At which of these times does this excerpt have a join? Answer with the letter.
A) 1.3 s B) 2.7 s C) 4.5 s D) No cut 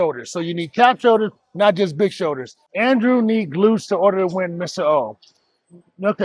B